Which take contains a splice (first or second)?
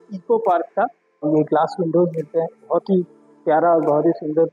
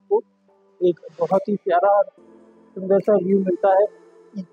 first